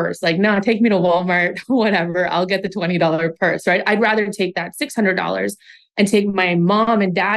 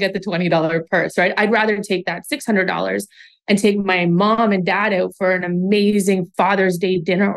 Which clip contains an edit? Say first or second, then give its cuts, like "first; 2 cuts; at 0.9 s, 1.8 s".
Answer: second; 1 cut; at 6.3 s